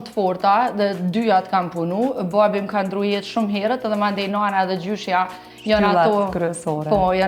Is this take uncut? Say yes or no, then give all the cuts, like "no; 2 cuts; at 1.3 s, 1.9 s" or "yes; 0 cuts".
yes; 0 cuts